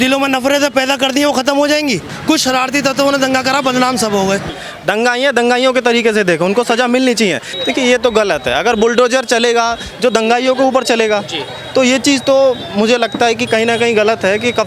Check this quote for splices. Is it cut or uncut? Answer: cut